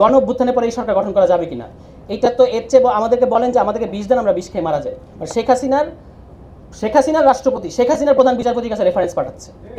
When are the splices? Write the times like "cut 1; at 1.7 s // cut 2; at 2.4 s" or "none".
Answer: none

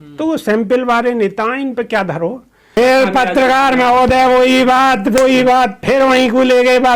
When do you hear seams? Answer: cut 1; at 2.8 s

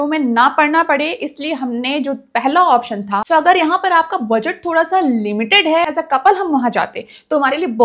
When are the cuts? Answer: cut 1; at 3.2 s // cut 2; at 5.8 s

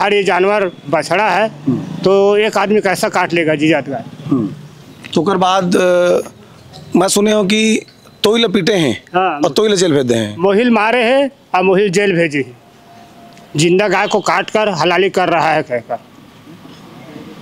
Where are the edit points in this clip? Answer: none

